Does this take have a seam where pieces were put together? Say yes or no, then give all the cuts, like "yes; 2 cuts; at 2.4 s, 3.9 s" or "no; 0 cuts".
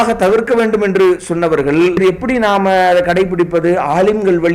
yes; 1 cut; at 2.0 s